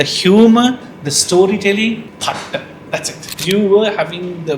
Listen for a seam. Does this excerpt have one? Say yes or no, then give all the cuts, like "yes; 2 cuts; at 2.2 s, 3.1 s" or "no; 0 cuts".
yes; 2 cuts; at 2.1 s, 3.3 s